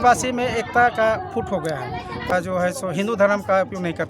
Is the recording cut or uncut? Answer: cut